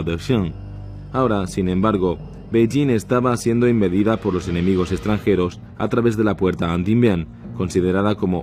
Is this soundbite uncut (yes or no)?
no